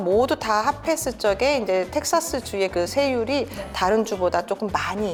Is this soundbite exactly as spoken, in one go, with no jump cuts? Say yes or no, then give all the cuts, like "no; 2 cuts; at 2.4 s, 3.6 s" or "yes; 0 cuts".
yes; 0 cuts